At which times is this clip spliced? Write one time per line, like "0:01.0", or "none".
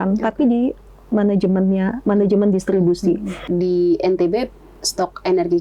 0:03.5